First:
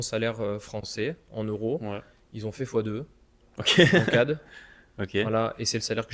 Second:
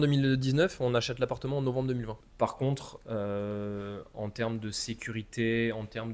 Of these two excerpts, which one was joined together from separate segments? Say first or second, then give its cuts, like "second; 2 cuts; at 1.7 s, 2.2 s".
second; 1 cut; at 2.2 s